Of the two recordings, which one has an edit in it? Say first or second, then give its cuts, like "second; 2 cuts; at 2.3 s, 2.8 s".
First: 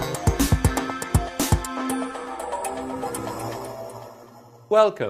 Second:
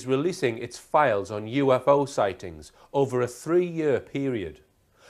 first; 1 cut; at 2.8 s